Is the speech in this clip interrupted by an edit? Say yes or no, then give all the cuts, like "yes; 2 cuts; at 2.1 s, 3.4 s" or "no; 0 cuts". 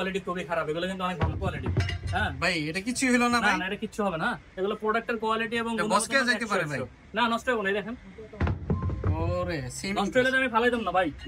no; 0 cuts